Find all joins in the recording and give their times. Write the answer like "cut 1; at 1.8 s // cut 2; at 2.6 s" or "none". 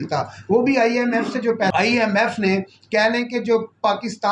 cut 1; at 1.7 s